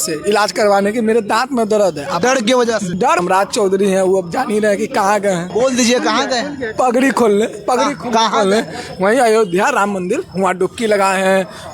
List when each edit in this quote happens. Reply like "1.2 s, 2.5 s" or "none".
3.2 s